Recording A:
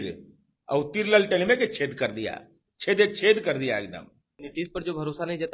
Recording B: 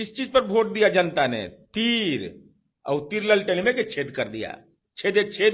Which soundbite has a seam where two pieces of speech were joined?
A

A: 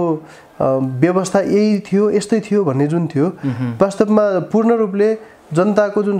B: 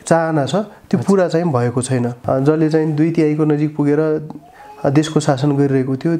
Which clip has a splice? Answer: B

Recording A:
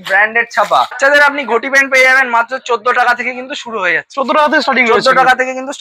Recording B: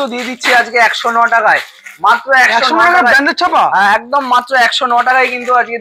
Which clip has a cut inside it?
A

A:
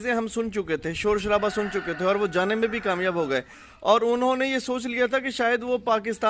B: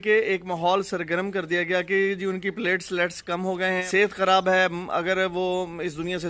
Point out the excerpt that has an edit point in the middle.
B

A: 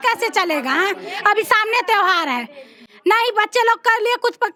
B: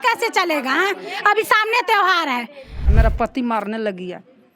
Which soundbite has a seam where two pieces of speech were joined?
B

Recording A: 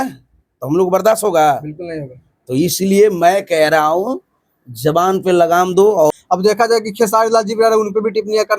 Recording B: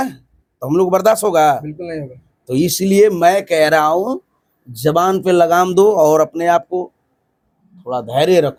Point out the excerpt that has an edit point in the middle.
A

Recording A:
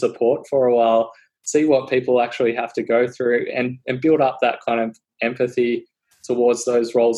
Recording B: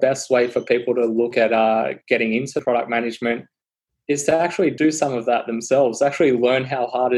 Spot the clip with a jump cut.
B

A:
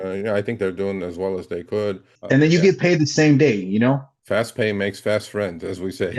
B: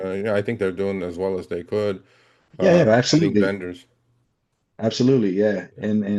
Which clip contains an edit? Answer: A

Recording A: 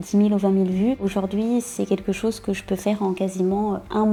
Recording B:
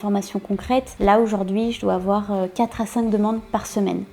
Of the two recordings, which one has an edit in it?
B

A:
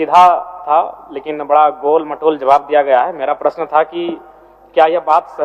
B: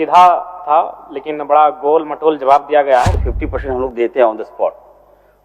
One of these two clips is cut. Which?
B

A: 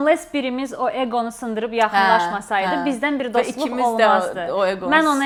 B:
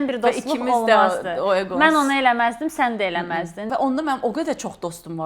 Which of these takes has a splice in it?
B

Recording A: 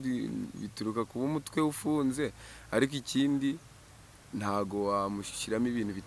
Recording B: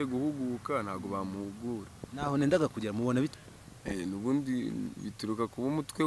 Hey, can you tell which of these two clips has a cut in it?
B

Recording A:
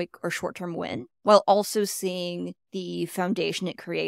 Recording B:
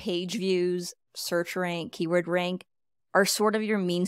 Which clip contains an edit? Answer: A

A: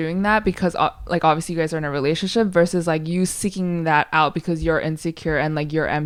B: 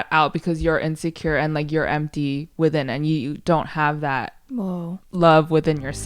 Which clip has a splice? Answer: B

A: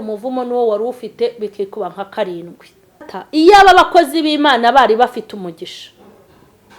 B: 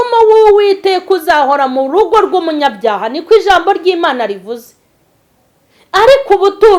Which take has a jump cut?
A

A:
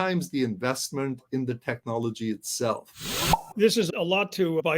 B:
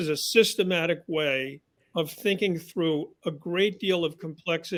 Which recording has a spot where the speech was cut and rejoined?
A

